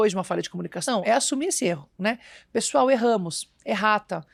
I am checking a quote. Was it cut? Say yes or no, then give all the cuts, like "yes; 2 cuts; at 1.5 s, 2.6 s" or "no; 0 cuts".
no; 0 cuts